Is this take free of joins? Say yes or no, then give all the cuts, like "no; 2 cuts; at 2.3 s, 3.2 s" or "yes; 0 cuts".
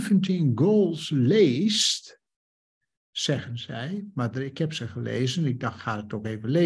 yes; 0 cuts